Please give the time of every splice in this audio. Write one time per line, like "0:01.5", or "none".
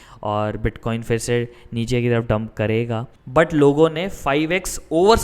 0:03.1